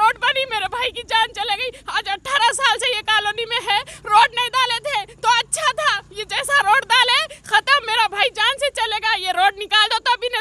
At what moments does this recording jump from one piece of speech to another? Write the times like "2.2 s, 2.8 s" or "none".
none

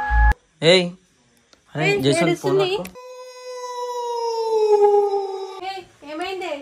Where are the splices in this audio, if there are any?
5.6 s

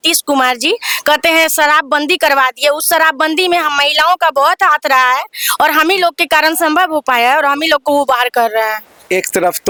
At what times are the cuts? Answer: none

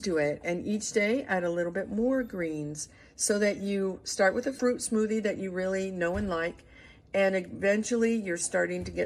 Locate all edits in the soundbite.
4.6 s

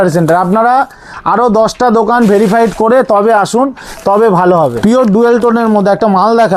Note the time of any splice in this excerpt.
4.8 s

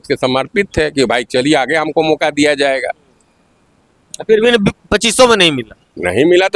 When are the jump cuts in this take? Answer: none

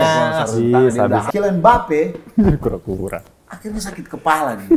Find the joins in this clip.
1.2 s

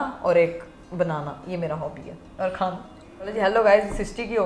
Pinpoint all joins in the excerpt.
3.3 s

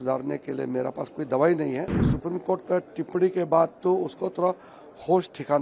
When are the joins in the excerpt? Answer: 2.1 s

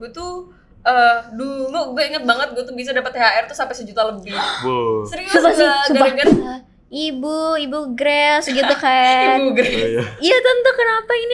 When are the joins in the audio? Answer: 6.4 s

